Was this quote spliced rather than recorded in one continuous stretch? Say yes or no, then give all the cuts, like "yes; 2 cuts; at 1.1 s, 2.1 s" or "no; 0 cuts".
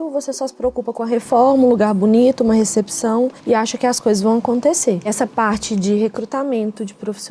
yes; 2 cuts; at 3.4 s, 5.1 s